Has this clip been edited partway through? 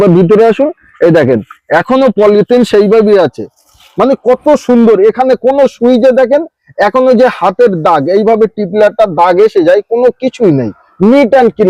no; 0 cuts

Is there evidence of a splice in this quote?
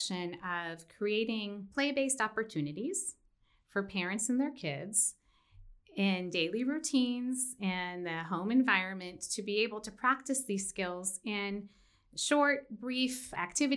no; 0 cuts

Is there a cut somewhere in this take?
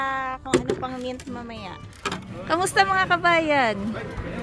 yes; 1 cut; at 2.1 s

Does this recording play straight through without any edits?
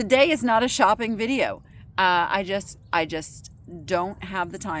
yes; 0 cuts

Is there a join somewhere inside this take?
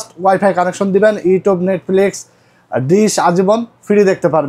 no; 0 cuts

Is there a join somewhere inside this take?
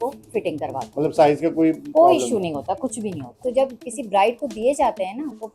yes; 1 cut; at 3.4 s

